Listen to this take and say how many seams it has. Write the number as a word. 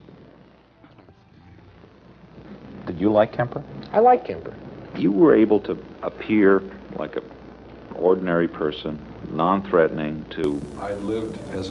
zero